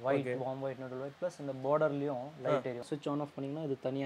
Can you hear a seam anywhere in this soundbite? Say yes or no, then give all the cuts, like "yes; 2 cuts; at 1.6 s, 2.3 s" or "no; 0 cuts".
yes; 1 cut; at 2.9 s